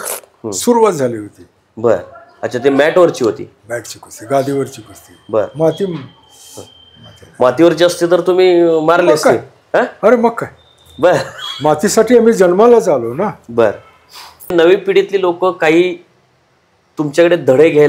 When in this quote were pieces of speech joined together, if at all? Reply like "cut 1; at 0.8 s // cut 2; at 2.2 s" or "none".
cut 1; at 14.5 s